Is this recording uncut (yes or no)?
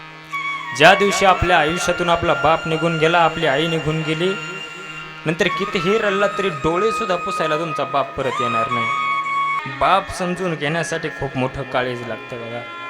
no